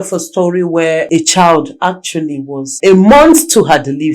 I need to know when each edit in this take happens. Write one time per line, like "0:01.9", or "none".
0:01.1
0:02.7